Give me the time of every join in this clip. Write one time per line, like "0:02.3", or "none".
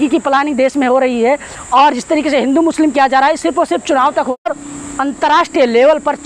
0:04.5